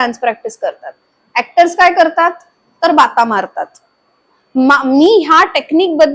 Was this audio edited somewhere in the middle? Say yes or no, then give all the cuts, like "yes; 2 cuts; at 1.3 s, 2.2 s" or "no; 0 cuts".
no; 0 cuts